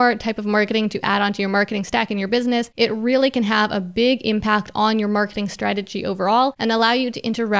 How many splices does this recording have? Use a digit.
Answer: 2